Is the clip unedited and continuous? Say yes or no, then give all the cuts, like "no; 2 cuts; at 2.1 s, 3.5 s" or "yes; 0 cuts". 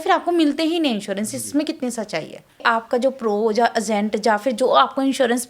no; 1 cut; at 2.6 s